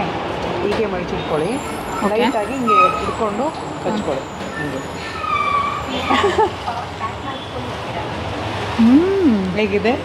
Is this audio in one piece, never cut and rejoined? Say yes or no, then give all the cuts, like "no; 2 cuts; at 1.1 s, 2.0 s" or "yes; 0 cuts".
yes; 0 cuts